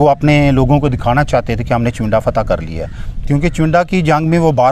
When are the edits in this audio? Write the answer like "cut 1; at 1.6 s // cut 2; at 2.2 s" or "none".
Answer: none